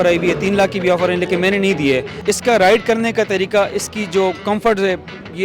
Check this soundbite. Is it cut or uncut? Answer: cut